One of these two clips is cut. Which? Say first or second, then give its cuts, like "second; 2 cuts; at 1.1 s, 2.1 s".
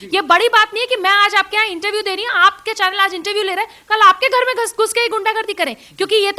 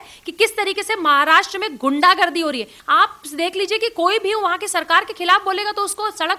second; 1 cut; at 2.7 s